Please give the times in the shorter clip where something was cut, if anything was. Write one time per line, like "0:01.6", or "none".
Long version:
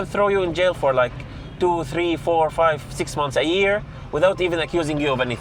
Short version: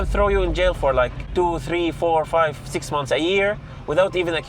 0:01.2